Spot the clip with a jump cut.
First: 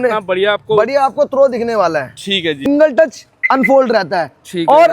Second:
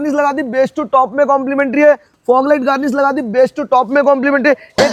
first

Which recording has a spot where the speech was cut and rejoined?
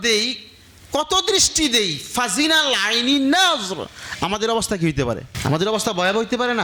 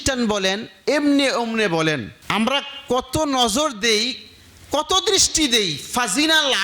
second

